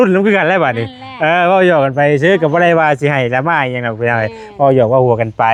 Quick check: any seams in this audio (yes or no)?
no